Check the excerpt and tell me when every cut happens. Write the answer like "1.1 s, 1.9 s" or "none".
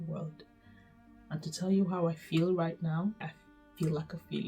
3.2 s